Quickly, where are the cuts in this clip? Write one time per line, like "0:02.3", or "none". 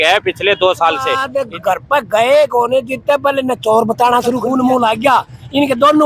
0:01.3
0:04.4